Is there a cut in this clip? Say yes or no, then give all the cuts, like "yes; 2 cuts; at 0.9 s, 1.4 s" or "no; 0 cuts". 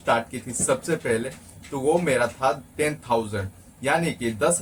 no; 0 cuts